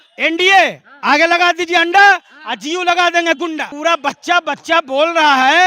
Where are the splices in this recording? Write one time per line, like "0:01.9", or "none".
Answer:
0:03.7